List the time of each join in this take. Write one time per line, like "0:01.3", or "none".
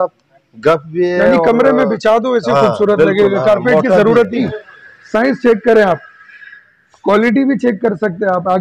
0:04.4